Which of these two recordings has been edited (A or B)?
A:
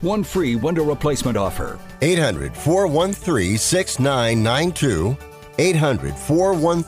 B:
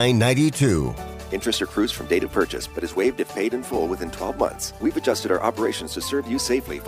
B